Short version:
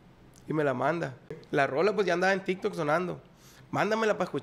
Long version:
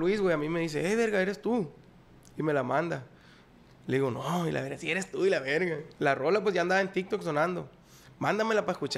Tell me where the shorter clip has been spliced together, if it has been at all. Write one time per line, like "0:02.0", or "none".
0:01.4